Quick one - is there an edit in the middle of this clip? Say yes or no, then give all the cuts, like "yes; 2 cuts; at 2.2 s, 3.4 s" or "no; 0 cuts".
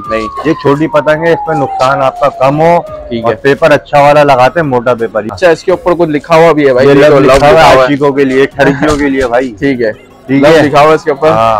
yes; 1 cut; at 5.3 s